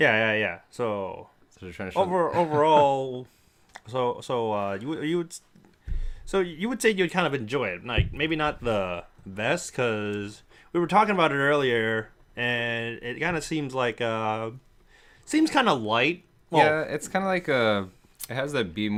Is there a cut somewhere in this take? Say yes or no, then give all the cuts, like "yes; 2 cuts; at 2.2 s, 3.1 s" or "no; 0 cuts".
no; 0 cuts